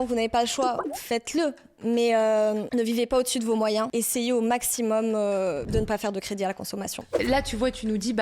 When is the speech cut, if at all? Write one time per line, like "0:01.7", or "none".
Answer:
0:00.9
0:03.9
0:05.7
0:07.2